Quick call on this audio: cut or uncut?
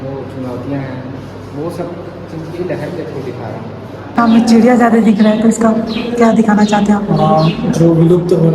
cut